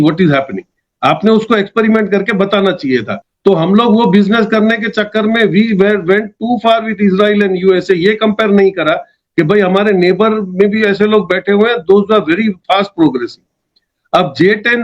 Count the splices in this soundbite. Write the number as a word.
zero